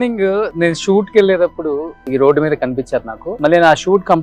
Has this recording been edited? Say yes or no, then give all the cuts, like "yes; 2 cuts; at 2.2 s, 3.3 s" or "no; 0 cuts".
yes; 2 cuts; at 1.9 s, 3.2 s